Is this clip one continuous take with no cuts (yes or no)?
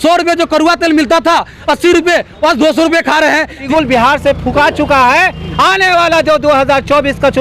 no